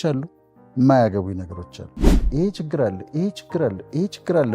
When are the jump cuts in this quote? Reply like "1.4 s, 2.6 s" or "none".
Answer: 2.2 s